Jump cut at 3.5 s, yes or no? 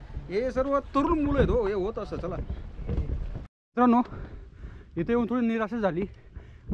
yes